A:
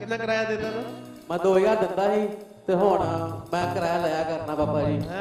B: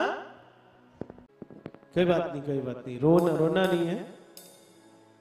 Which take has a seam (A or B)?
B